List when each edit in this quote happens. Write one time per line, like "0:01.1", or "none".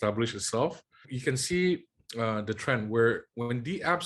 0:01.1